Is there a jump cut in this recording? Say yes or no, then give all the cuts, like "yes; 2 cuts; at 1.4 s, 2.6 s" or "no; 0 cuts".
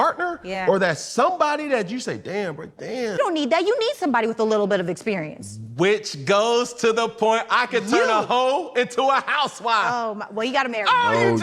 yes; 1 cut; at 3.2 s